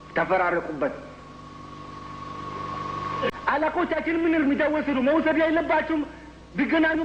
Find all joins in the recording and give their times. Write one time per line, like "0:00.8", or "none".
0:03.3